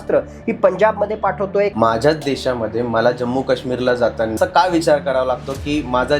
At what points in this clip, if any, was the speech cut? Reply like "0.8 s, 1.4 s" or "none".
1.7 s, 4.4 s